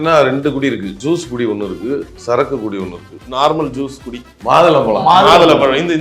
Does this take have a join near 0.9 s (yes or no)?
yes